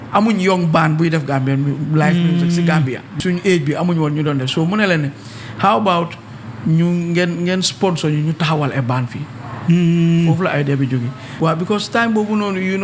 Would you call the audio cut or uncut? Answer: cut